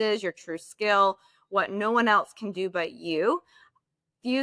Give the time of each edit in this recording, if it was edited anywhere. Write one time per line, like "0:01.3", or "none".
none